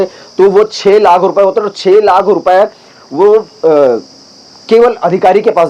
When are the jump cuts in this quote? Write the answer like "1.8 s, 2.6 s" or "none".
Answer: none